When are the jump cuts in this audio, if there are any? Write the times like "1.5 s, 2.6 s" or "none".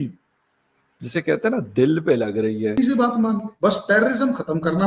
2.8 s